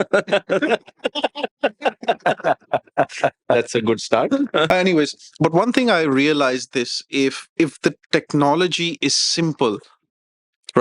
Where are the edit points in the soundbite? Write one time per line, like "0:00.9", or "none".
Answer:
0:04.7